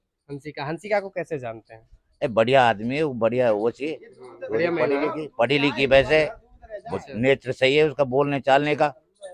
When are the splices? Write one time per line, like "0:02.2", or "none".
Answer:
none